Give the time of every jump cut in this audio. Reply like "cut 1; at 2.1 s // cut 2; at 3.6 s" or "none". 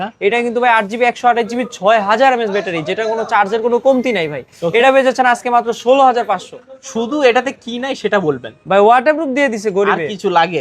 none